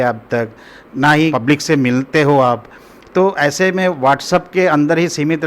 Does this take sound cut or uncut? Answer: cut